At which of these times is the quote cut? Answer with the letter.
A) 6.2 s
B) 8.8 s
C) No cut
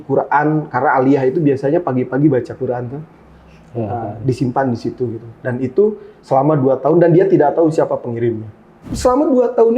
B